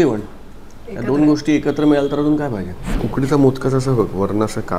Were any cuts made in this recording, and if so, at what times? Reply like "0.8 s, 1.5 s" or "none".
2.9 s